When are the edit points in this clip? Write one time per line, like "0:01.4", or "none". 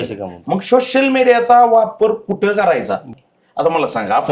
0:03.1

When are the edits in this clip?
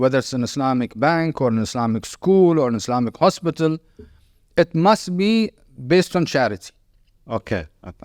none

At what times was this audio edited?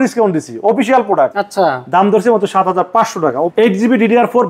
0:01.4
0:03.5

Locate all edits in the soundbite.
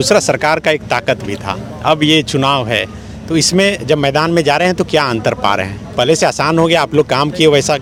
none

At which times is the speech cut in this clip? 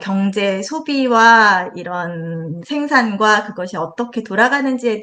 none

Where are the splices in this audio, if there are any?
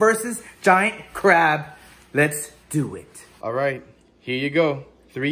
0:03.4

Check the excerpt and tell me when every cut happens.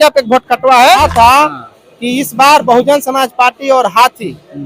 0:01.0

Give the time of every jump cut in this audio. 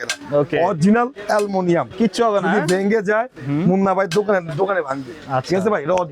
none

